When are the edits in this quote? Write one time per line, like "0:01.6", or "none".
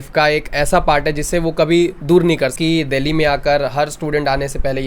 0:02.5